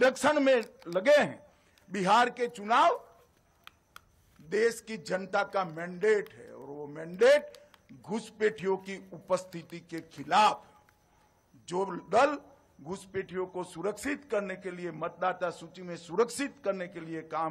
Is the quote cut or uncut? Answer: uncut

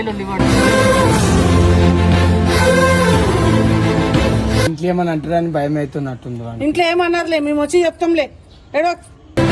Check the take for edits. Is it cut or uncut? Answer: cut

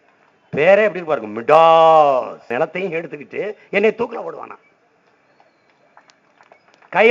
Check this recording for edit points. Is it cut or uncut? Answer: cut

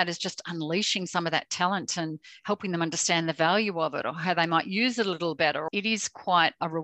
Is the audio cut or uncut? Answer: cut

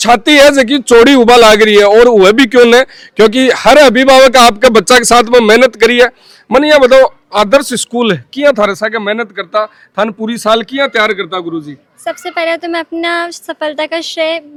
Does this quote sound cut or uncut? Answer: uncut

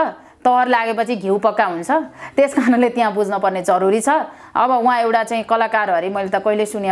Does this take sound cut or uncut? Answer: uncut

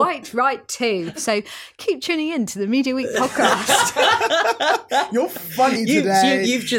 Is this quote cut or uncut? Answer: cut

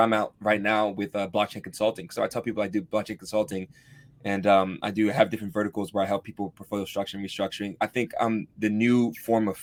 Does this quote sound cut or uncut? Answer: uncut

